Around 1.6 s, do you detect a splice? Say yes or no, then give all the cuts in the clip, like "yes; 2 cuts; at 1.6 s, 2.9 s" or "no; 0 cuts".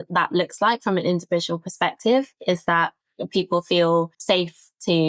no; 1 cut; at 4.1 s